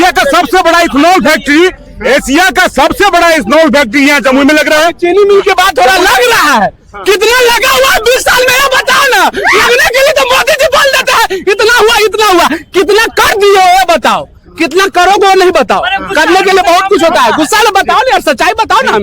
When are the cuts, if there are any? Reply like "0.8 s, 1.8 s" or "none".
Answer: none